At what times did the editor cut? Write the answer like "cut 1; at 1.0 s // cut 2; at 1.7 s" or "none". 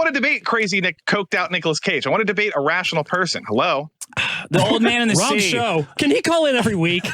cut 1; at 1.0 s // cut 2; at 5.9 s